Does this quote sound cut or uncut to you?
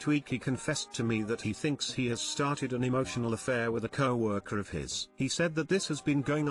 uncut